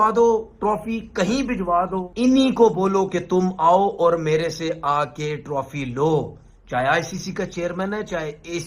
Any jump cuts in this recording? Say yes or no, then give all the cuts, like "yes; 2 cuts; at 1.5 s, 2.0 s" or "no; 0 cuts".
yes; 1 cut; at 2.1 s